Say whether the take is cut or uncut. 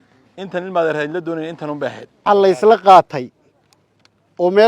cut